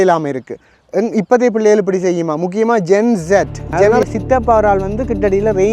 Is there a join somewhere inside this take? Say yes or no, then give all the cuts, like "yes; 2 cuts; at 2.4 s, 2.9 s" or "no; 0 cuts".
yes; 1 cut; at 3.9 s